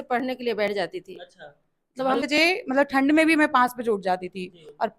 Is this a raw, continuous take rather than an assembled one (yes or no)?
no